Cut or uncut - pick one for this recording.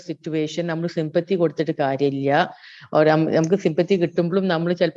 uncut